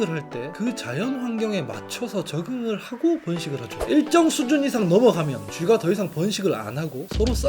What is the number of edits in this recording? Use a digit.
1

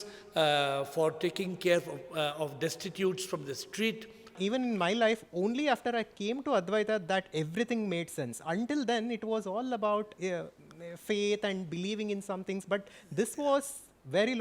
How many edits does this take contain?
1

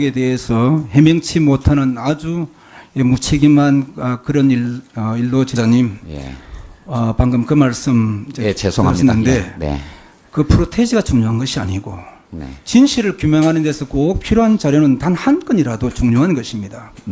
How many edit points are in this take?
0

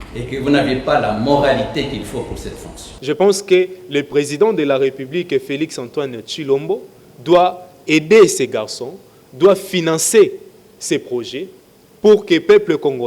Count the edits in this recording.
1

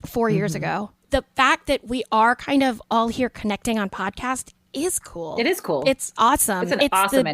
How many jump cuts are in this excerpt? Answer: 1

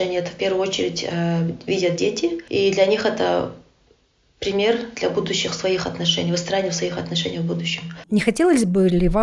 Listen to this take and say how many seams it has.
2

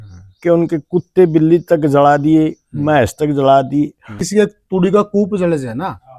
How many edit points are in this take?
1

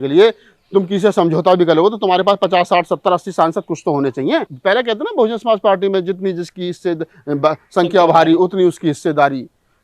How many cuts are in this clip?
1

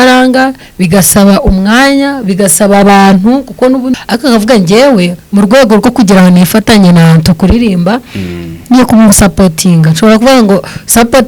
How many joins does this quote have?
1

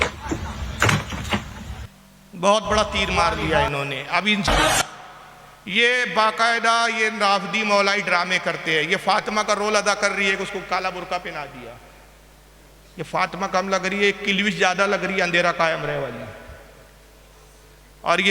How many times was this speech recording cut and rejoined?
1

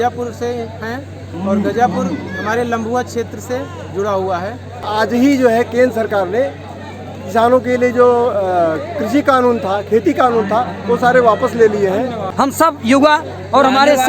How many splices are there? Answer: 2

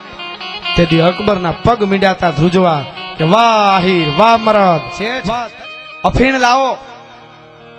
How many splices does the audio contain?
1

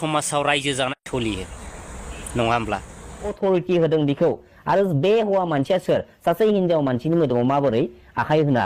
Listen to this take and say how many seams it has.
1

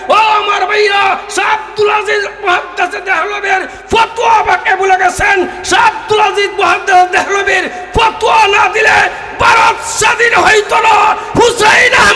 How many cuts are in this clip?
0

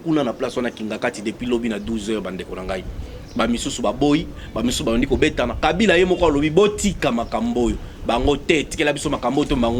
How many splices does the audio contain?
0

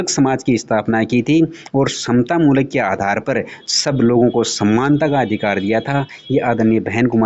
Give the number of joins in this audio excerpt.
0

